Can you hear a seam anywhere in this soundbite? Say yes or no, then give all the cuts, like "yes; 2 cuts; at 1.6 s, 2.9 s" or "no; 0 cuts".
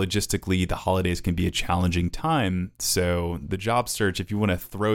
no; 0 cuts